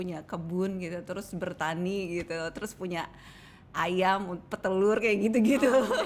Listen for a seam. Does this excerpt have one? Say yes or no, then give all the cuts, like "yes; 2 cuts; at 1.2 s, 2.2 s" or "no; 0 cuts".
no; 0 cuts